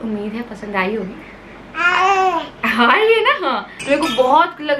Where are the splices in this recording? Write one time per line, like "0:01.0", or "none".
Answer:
0:03.7